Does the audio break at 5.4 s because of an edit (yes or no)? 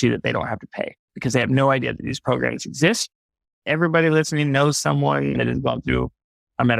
yes